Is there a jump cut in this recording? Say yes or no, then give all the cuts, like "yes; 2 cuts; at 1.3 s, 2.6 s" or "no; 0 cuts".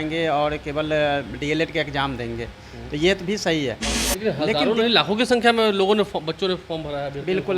yes; 1 cut; at 3.9 s